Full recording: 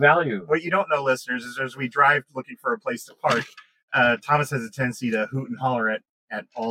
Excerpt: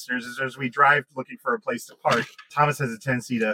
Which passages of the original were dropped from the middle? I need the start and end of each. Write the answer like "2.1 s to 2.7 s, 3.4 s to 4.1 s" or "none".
3.7 s to 4.2 s